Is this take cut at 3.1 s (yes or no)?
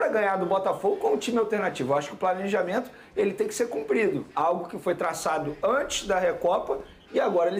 no